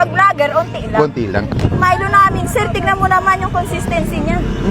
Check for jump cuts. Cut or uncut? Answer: cut